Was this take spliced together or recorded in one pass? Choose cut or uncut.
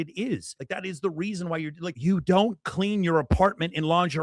cut